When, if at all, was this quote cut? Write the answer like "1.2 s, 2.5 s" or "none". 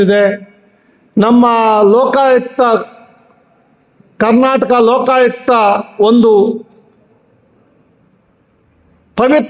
none

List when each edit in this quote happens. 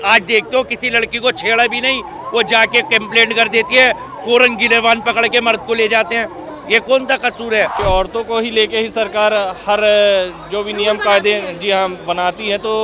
7.8 s

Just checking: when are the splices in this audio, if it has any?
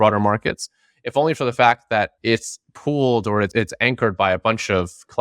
2.1 s, 3.5 s

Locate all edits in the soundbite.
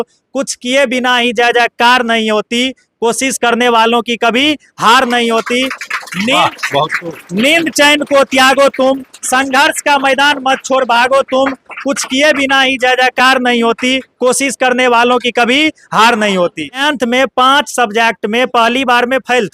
16.8 s

